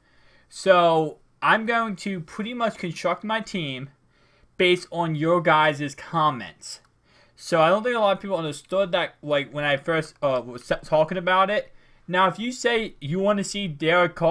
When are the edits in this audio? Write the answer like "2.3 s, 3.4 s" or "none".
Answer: 3.1 s